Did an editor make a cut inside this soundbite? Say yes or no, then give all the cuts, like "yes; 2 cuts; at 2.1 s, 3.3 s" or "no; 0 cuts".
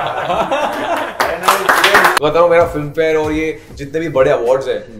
yes; 1 cut; at 2.1 s